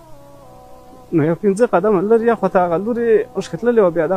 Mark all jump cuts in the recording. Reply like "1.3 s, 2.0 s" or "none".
none